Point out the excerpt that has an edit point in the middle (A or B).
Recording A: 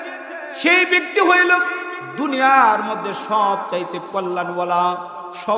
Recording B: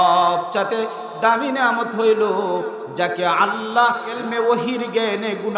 B